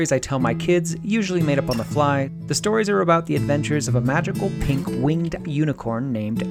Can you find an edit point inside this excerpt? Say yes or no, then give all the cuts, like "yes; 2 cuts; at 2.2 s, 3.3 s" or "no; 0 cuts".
yes; 1 cut; at 2.4 s